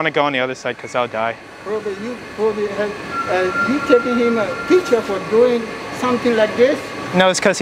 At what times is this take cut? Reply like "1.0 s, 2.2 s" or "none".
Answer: none